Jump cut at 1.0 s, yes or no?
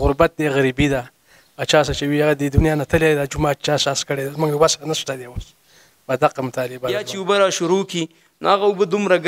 no